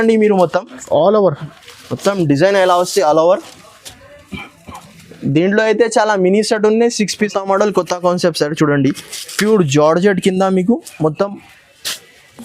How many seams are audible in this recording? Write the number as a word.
one